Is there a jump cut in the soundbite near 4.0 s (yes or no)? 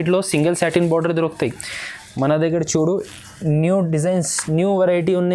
no